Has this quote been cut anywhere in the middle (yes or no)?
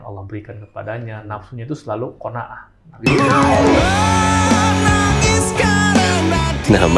yes